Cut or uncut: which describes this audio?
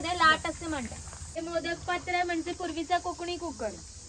cut